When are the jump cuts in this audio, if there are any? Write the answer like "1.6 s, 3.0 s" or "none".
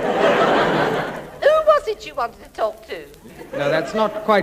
3.2 s